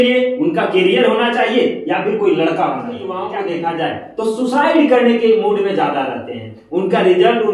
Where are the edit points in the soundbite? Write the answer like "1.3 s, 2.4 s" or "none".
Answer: 3.2 s